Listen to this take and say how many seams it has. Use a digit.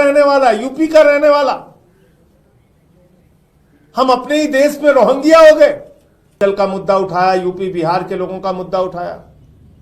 1